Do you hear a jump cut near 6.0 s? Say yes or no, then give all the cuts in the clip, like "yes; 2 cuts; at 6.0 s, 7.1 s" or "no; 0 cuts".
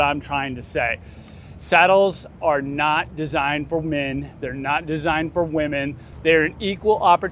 yes; 1 cut; at 6.0 s